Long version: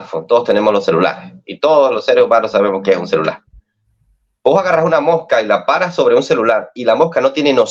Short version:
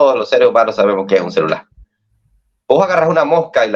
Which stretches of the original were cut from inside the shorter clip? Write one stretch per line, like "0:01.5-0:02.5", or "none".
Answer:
none